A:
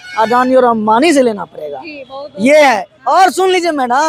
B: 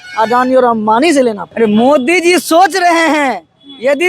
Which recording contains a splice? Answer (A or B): B